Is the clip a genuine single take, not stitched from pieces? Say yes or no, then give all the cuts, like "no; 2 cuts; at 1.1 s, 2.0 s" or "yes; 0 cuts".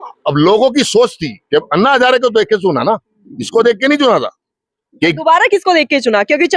yes; 0 cuts